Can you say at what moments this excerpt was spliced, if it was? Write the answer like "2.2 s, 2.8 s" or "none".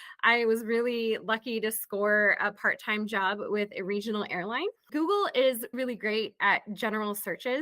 4.8 s